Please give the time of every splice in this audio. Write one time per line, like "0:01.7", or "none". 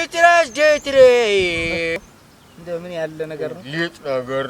0:02.0